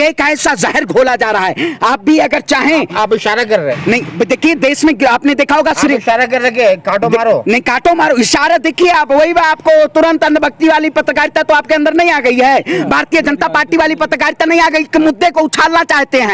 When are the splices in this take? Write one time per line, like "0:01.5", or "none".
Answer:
none